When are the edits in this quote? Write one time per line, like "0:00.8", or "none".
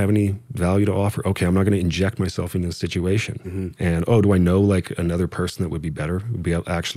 none